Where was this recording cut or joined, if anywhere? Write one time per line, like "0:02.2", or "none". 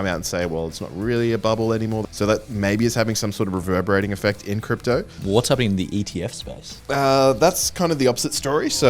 0:02.0
0:05.2